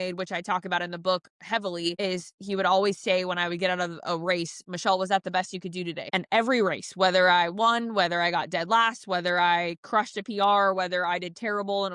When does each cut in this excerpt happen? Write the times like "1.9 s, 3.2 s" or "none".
6.0 s

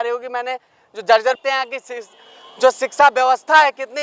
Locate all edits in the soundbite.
1.4 s

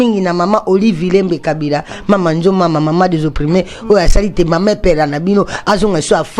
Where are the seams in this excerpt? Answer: none

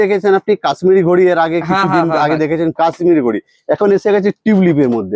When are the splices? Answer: none

